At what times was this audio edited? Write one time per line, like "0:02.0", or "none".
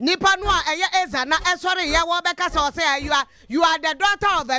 none